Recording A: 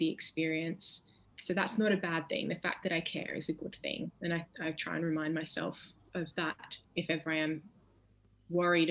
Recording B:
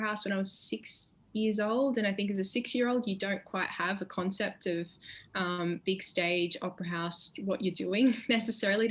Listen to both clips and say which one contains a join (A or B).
A